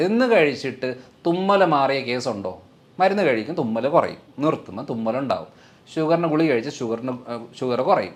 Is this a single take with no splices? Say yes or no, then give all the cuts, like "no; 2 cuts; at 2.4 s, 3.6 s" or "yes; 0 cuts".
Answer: yes; 0 cuts